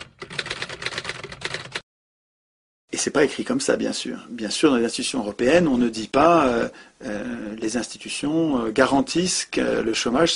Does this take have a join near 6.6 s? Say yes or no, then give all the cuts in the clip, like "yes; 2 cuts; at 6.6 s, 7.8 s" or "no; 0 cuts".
yes; 1 cut; at 6.6 s